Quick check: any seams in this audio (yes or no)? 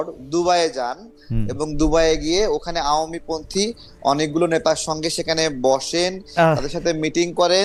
no